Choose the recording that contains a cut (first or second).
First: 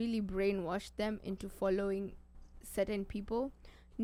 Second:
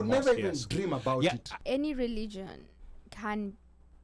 second